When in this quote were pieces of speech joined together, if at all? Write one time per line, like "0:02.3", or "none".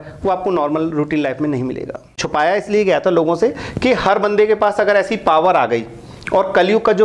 0:02.1